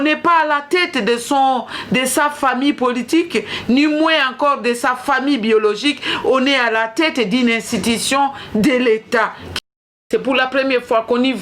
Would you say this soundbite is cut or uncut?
cut